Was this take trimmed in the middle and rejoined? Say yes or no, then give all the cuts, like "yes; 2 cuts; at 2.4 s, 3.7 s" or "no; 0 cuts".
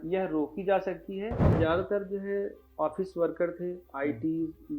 yes; 1 cut; at 1.5 s